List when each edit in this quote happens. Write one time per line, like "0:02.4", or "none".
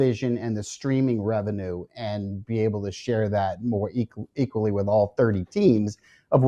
none